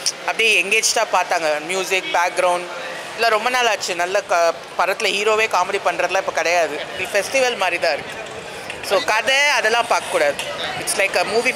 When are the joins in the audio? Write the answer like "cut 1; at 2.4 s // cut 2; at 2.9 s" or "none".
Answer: cut 1; at 7.0 s